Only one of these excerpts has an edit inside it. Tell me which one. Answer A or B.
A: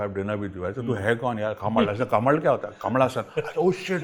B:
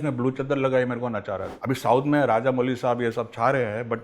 B